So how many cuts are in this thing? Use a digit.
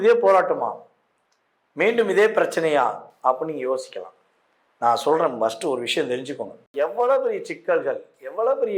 1